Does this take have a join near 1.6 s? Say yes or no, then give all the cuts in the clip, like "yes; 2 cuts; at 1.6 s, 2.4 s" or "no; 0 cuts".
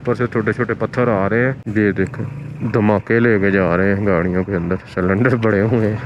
yes; 1 cut; at 1.6 s